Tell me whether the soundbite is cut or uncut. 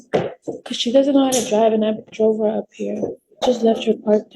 cut